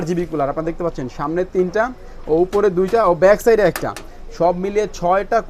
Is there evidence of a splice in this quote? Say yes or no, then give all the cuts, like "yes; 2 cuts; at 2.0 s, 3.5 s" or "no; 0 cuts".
no; 0 cuts